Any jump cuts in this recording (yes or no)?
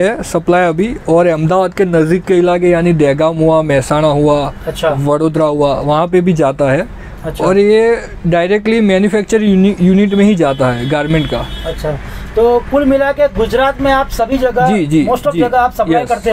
no